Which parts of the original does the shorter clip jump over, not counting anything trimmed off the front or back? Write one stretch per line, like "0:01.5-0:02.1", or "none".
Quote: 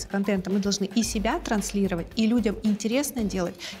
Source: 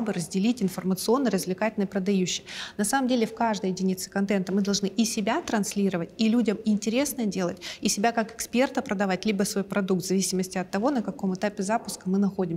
none